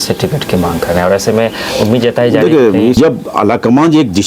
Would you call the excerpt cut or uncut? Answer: cut